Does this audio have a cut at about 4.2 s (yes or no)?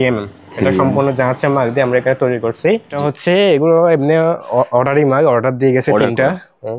no